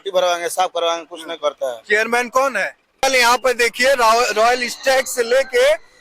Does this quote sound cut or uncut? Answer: cut